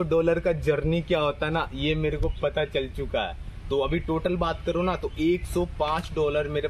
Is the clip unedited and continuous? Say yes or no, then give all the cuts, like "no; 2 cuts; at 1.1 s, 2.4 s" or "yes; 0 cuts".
yes; 0 cuts